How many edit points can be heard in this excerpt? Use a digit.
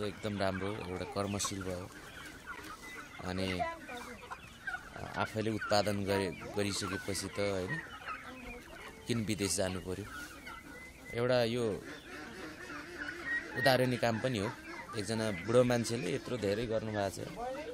0